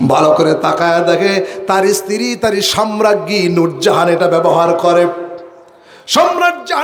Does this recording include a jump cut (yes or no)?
no